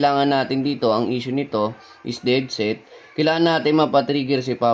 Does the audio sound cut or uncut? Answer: uncut